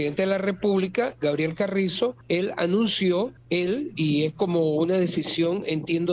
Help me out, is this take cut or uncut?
cut